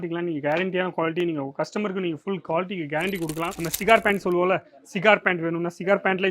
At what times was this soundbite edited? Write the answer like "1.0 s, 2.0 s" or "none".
3.6 s